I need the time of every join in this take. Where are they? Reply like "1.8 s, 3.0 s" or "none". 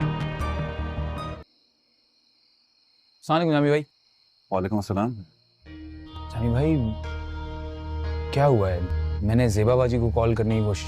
1.3 s